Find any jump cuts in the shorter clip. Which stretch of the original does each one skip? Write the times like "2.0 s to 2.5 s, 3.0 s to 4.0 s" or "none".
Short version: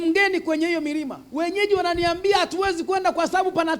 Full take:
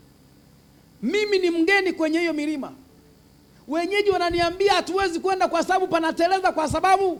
2.7 s to 3.6 s